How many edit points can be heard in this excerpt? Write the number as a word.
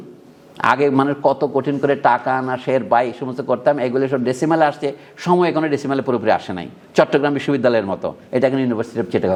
zero